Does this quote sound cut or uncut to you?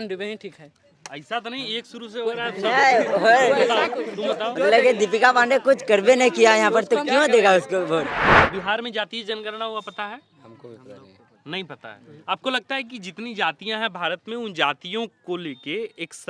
cut